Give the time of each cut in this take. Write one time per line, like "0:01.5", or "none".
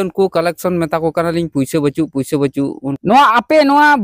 0:02.9